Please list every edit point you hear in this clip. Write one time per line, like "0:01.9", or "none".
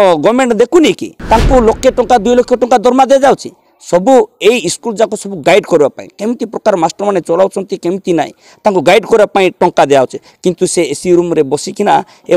0:01.1